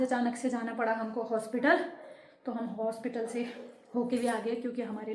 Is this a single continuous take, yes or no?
yes